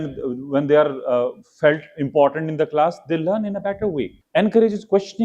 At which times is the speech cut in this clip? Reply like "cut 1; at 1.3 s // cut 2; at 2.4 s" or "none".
cut 1; at 4.2 s